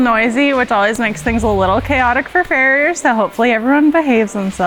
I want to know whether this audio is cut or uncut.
uncut